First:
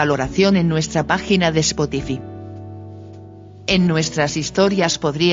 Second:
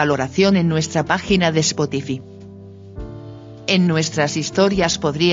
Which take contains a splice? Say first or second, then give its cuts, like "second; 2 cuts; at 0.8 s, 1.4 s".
first; 2 cuts; at 2.2 s, 3.6 s